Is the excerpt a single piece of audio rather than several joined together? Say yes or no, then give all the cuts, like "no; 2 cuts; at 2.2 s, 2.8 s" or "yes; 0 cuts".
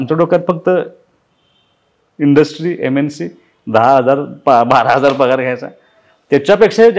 yes; 0 cuts